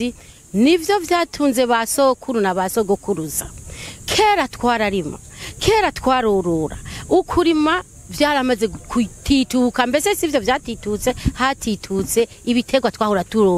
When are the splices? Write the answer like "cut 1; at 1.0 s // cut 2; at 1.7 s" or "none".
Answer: none